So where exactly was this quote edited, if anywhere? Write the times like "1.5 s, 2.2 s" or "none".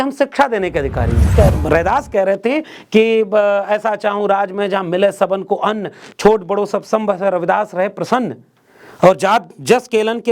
1.3 s